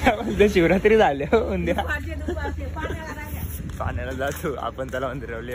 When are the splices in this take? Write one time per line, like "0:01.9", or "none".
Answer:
none